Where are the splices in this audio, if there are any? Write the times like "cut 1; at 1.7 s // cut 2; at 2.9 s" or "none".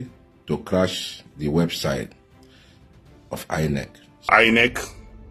cut 1; at 4.3 s